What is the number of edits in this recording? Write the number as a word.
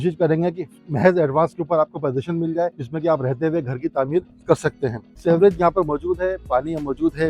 two